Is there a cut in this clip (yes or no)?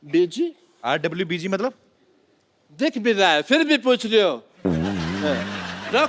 no